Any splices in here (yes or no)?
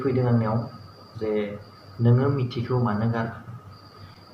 no